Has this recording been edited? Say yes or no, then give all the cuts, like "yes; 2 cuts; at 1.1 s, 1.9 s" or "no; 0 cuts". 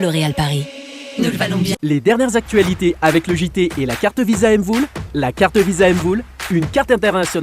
yes; 1 cut; at 1.8 s